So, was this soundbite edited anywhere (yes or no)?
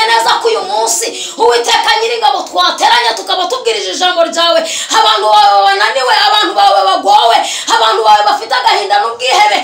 no